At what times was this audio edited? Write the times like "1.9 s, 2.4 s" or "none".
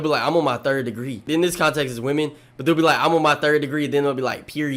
1.2 s